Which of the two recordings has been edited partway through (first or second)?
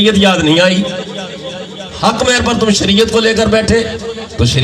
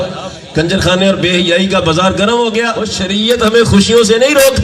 second